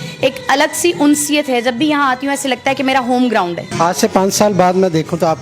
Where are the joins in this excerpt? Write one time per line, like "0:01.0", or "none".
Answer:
0:03.7

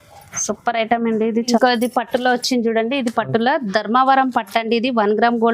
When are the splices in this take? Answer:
0:01.5

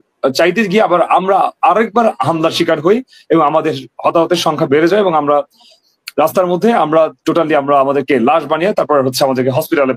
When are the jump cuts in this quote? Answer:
none

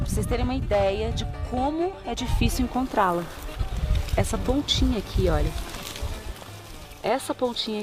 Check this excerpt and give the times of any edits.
none

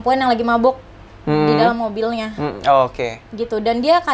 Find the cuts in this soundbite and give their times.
none

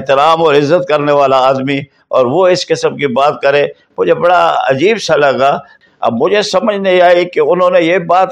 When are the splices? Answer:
0:05.7

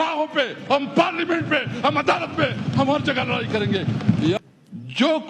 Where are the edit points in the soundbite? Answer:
0:04.4

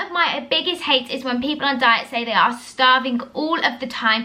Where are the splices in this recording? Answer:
none

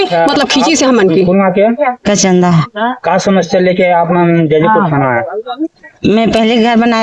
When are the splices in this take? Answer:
0:01.3

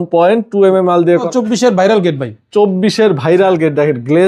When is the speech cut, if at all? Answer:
0:01.3

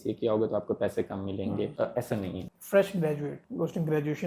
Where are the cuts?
0:02.1
0:03.4

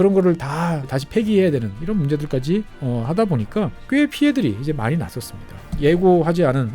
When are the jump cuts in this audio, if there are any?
0:01.0
0:02.7
0:03.8
0:05.6

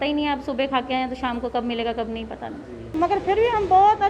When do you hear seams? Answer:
0:02.9

